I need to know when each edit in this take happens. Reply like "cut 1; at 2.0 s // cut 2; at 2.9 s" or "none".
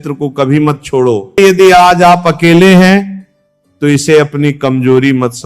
cut 1; at 1.4 s